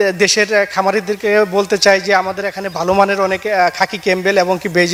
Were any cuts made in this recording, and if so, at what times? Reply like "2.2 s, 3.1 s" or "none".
none